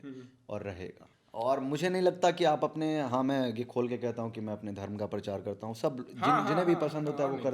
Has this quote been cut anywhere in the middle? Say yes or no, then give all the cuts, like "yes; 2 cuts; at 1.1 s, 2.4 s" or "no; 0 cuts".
yes; 1 cut; at 1.0 s